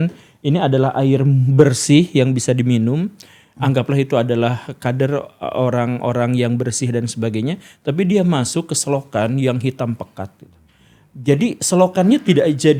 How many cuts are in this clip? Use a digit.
0